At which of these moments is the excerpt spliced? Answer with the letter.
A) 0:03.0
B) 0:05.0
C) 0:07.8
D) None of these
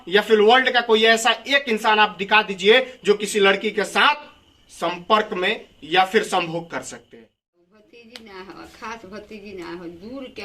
C